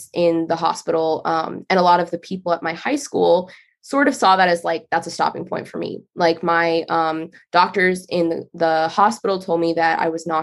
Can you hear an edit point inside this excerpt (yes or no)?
no